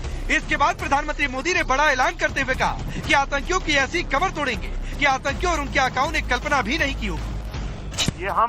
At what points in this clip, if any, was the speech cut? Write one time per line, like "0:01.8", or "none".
0:06.4